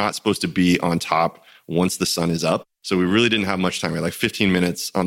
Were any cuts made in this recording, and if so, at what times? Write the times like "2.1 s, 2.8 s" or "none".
2.7 s